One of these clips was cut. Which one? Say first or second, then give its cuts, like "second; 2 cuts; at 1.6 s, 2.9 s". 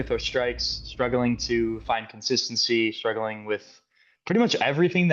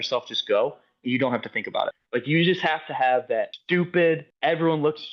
second; 3 cuts; at 2.0 s, 3.6 s, 4.3 s